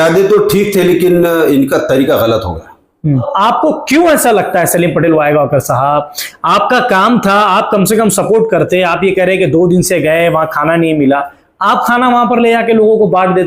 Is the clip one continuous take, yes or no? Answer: no